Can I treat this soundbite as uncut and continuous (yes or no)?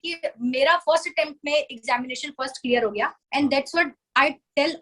no